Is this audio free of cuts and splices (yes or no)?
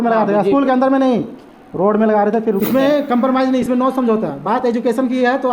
no